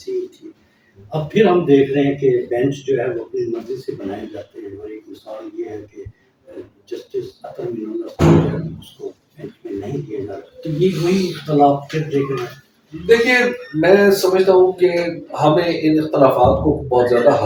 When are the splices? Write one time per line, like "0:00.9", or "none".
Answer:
none